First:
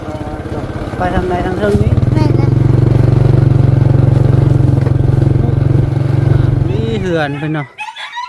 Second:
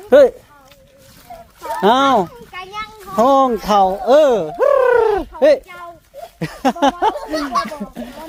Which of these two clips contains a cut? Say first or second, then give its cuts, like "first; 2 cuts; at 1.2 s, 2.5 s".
first; 1 cut; at 6.8 s